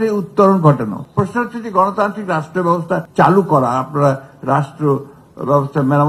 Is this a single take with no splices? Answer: no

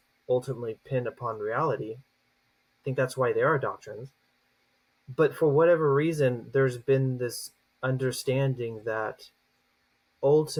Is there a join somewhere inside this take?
no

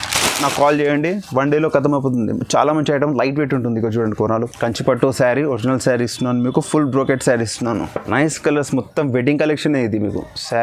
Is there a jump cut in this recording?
yes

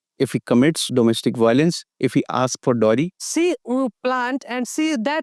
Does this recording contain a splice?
yes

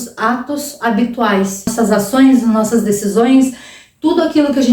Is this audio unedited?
no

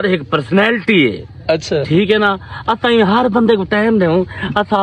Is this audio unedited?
yes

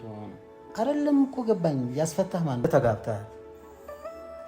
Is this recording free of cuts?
no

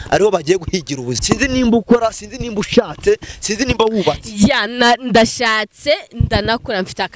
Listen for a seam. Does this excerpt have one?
yes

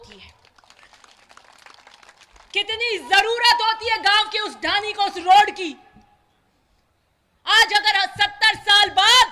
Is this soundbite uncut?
yes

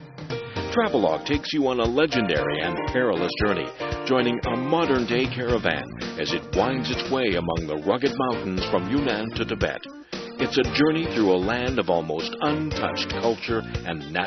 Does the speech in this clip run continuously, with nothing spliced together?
yes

